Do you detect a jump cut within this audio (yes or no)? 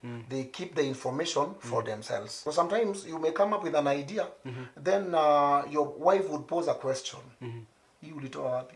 yes